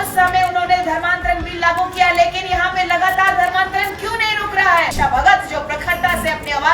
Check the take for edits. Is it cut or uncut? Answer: cut